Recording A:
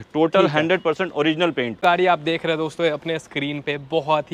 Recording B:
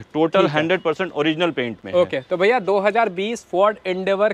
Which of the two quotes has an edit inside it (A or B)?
A